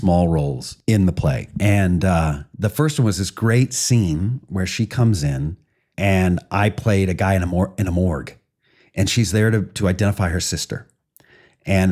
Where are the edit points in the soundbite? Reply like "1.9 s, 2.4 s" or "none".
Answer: 1.4 s